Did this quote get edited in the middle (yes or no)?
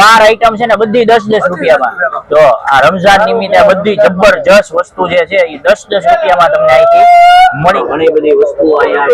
yes